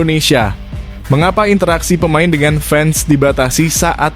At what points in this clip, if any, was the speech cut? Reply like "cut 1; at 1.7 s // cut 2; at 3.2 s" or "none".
none